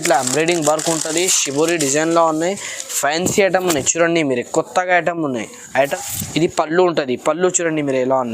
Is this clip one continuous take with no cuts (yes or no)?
no